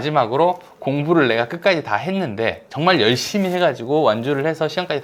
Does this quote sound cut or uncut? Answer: uncut